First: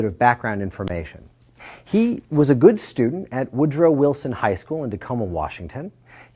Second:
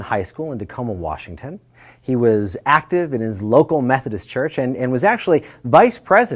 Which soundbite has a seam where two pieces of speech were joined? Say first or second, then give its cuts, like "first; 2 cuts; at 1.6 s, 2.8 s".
second; 1 cut; at 3.4 s